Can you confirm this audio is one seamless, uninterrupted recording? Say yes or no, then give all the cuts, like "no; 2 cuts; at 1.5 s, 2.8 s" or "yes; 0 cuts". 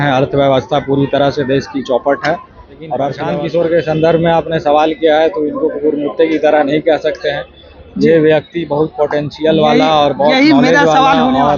no; 1 cut; at 3.2 s